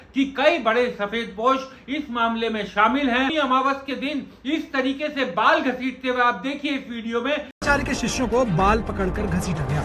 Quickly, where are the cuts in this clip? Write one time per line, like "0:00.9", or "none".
0:03.3
0:07.5